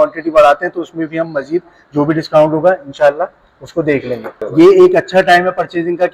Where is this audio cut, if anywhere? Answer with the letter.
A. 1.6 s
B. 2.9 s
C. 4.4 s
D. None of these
C